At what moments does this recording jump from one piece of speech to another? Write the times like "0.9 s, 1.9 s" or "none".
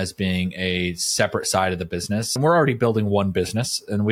2.4 s